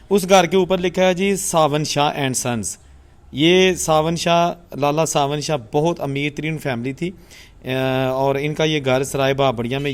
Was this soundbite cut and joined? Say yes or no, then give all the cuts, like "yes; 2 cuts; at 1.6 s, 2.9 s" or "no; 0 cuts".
no; 0 cuts